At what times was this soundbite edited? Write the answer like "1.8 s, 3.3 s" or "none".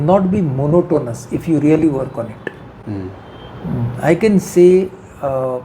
none